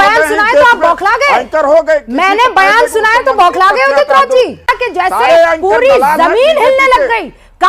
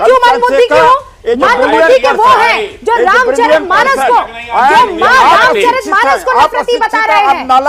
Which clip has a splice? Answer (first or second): first